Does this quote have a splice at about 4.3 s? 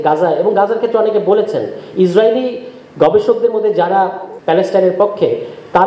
yes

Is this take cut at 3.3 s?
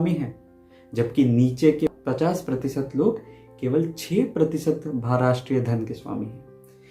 no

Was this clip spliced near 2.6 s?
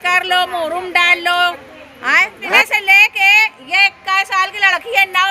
yes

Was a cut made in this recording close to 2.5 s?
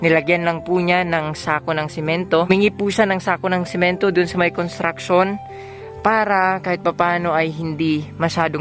yes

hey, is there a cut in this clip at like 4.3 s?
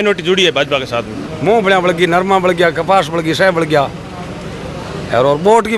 no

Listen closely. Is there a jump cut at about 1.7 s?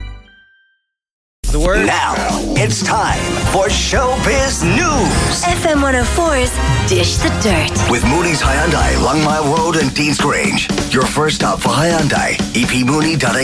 yes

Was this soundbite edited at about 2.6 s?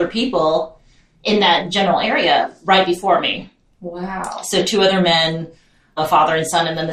no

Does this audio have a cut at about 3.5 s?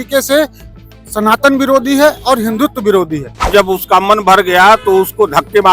yes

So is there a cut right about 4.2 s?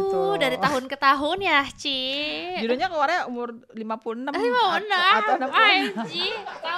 no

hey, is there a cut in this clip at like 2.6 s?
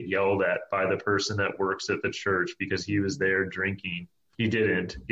no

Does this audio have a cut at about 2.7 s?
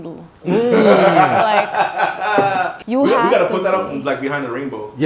yes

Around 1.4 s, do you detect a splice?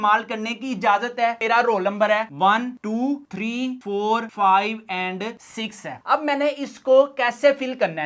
yes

